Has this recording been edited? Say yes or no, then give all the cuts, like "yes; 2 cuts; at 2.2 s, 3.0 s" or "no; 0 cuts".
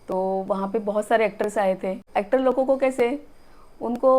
yes; 1 cut; at 2.0 s